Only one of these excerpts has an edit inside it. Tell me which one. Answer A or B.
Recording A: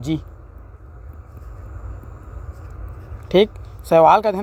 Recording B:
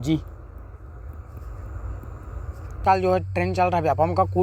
B